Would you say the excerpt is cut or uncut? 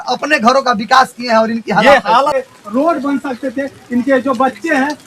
cut